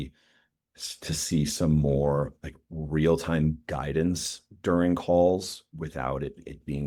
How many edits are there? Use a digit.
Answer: 0